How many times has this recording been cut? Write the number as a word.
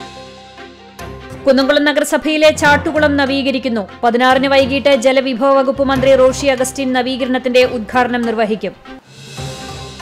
zero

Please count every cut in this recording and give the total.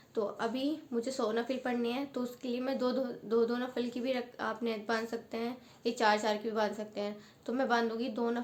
zero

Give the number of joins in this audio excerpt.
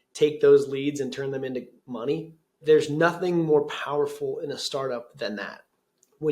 one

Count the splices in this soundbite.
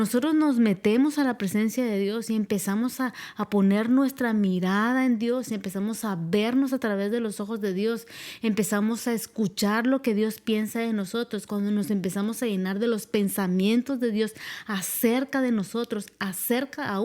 zero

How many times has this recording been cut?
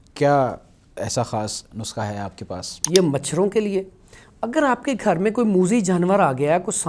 one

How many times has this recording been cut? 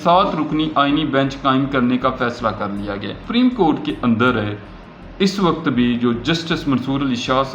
one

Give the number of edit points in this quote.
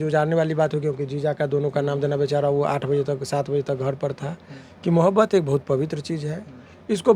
one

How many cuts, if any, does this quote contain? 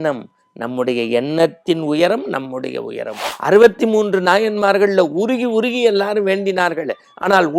one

